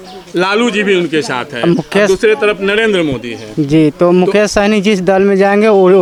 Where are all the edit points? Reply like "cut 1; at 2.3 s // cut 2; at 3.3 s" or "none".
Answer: none